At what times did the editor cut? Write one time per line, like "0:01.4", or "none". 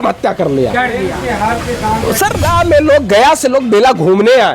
0:02.5